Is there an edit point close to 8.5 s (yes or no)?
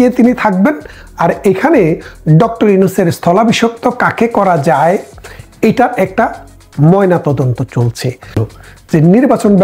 yes